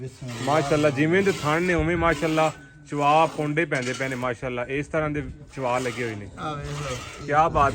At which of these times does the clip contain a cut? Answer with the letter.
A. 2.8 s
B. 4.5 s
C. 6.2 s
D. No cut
D